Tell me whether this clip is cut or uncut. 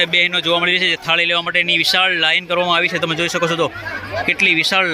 uncut